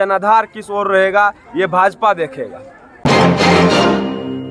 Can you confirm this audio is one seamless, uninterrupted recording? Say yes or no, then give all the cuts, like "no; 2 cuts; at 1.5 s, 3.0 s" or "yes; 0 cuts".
no; 1 cut; at 2.8 s